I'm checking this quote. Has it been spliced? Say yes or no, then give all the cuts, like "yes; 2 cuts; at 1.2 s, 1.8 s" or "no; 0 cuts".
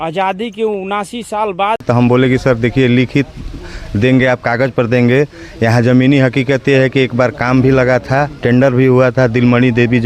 yes; 1 cut; at 1.8 s